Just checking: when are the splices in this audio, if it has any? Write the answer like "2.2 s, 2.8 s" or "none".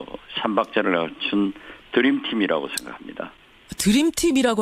2.7 s

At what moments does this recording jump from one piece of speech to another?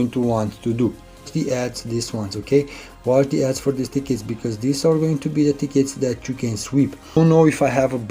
1.2 s, 7.2 s

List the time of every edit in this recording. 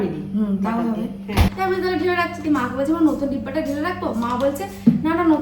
1.5 s

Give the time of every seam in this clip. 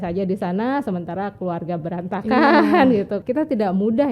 3.2 s

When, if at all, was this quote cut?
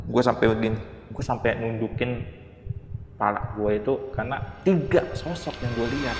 4.4 s

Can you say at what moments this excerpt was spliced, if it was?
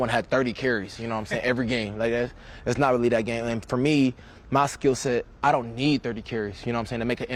none

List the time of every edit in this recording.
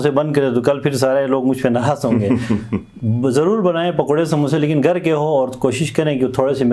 none

